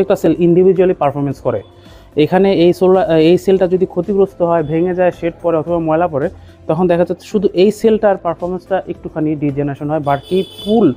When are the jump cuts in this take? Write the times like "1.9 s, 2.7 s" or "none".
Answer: none